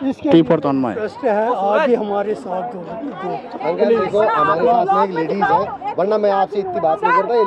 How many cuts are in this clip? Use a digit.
1